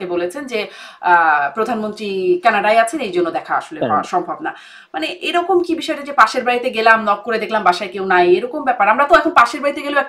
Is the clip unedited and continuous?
yes; 0 cuts

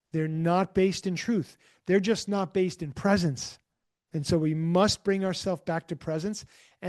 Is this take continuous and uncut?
yes; 0 cuts

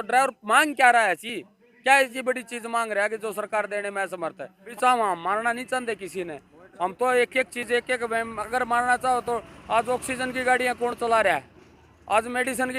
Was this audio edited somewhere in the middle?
yes; 1 cut; at 4.7 s

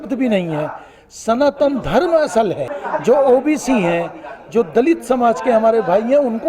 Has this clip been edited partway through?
yes; 1 cut; at 2.7 s

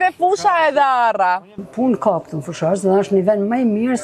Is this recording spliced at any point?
yes; 1 cut; at 1.6 s

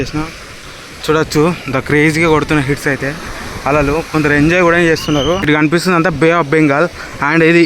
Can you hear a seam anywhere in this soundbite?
yes; 1 cut; at 5.5 s

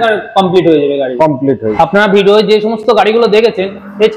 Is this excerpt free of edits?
yes; 0 cuts

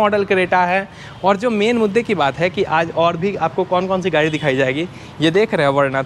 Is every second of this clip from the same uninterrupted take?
yes; 0 cuts

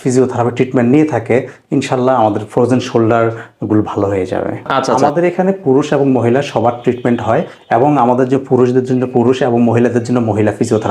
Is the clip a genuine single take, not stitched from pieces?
no; 1 cut; at 4.9 s

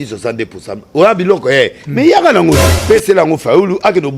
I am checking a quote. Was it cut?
yes; 1 cut; at 2.7 s

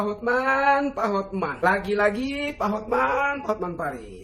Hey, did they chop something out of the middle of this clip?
no; 0 cuts

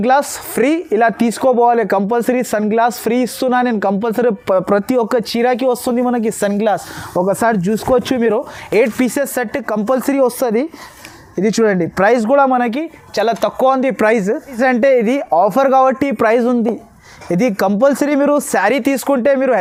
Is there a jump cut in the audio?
no; 0 cuts

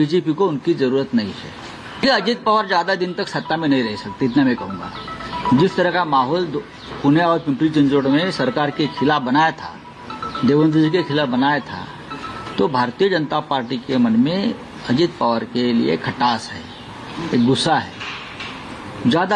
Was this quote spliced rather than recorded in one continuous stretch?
no; 0 cuts

